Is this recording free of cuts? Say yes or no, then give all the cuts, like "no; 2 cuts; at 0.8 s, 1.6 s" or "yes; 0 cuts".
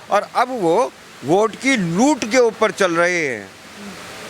yes; 0 cuts